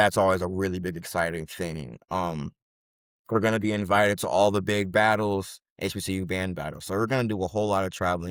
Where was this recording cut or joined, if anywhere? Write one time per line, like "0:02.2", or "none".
none

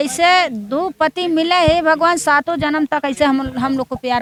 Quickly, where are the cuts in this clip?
none

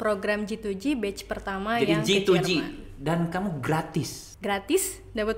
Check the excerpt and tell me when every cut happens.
0:04.2

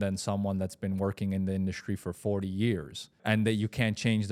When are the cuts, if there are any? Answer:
0:03.2

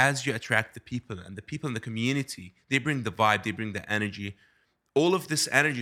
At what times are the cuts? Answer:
0:04.7

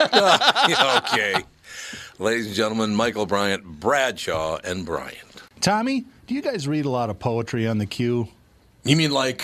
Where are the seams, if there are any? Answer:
0:05.4

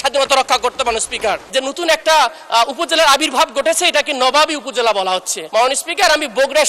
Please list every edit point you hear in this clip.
0:01.4
0:05.3

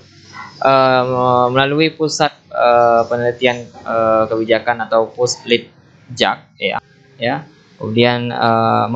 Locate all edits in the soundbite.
0:06.9

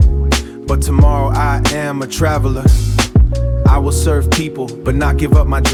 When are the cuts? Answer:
none

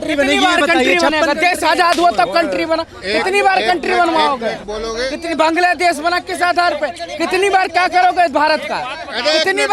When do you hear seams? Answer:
none

